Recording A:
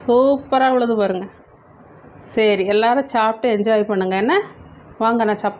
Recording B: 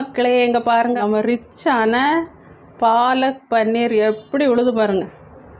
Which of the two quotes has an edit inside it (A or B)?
B